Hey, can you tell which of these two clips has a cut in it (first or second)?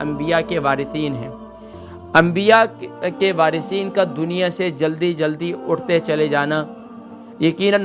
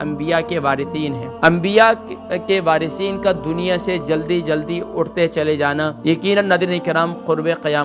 second